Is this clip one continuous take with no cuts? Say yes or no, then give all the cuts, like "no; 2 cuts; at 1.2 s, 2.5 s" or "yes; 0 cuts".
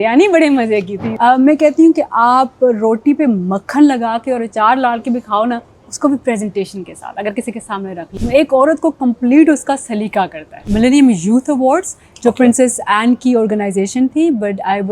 no; 3 cuts; at 1.0 s, 8.1 s, 10.6 s